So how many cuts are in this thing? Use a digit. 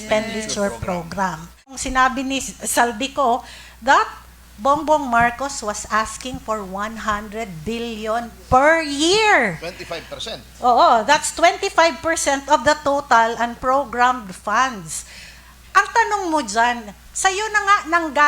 1